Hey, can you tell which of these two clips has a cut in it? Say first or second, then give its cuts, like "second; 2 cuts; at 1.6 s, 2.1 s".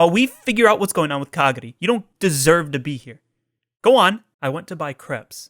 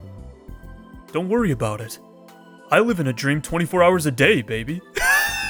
first; 1 cut; at 4.3 s